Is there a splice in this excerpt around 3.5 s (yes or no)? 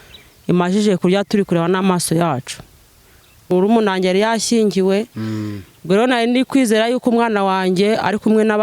yes